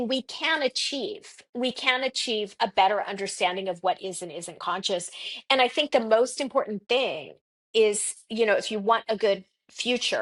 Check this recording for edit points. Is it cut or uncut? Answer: uncut